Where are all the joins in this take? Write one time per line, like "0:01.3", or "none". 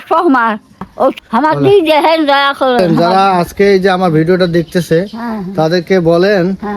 0:01.1
0:02.9